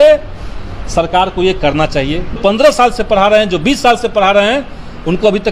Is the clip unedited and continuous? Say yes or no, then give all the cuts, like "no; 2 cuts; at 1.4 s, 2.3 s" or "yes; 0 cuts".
no; 1 cut; at 2.4 s